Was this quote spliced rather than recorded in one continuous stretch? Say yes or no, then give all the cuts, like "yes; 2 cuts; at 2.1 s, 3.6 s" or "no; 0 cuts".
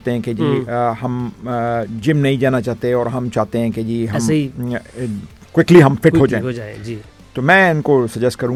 no; 0 cuts